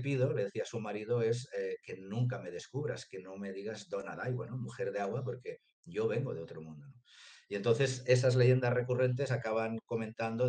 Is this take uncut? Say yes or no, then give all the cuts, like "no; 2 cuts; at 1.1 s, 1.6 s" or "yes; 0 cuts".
yes; 0 cuts